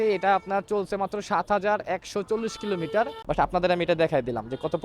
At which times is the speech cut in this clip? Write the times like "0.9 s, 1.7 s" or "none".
3.2 s